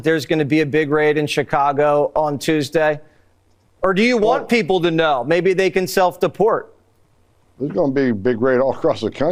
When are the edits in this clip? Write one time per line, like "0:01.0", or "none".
none